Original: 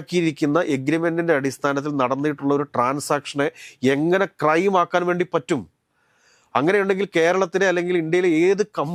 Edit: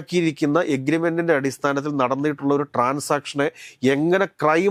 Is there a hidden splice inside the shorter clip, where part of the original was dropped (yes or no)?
no